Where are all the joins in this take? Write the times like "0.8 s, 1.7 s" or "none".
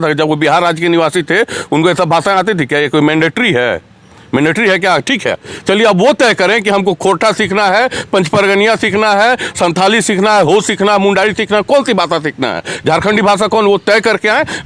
none